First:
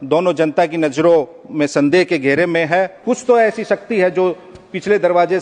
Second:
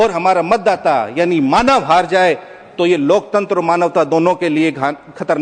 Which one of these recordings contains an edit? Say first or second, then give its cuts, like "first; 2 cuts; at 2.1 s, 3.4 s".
first; 1 cut; at 3.0 s